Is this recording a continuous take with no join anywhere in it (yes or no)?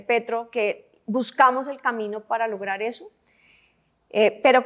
yes